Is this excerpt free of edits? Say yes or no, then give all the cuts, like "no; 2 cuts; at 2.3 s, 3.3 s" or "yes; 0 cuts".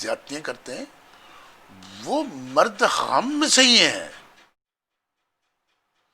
yes; 0 cuts